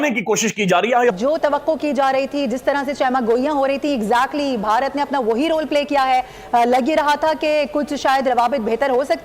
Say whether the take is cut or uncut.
cut